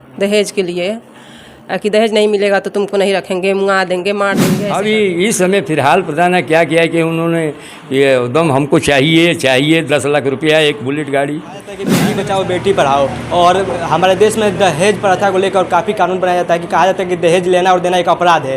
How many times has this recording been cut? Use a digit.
2